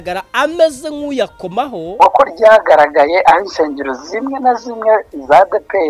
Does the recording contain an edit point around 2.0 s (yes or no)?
yes